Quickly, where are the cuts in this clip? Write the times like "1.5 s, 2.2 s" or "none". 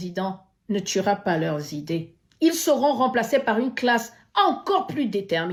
none